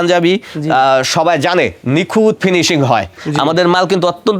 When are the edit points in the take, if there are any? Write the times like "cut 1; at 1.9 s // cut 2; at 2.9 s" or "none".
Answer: cut 1; at 3.2 s

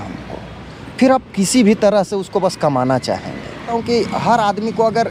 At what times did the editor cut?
cut 1; at 3.7 s

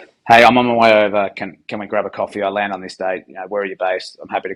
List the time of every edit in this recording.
none

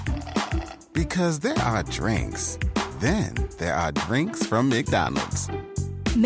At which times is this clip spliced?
none

